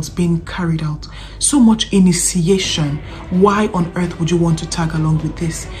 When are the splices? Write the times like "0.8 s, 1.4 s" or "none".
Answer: none